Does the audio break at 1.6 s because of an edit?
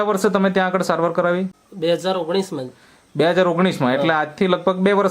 yes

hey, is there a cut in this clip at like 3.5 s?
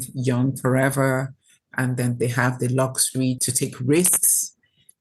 yes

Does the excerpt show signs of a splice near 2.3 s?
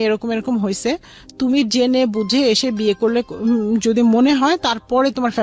no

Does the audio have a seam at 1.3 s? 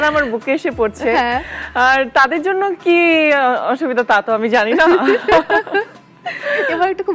no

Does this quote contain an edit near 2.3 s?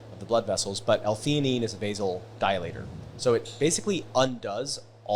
no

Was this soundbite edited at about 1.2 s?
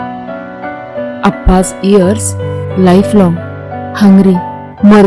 yes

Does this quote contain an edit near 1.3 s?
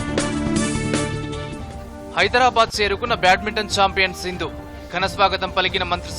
yes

